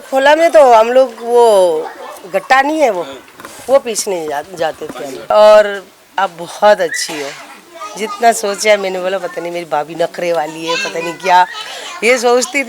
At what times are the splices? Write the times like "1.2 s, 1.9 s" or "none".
5.3 s